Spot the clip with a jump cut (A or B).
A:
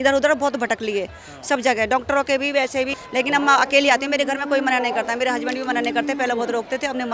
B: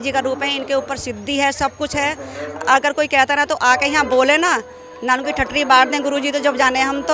A